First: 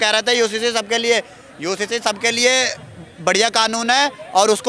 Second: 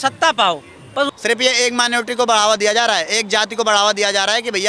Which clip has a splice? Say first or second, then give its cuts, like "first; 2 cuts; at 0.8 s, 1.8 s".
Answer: second; 1 cut; at 1.1 s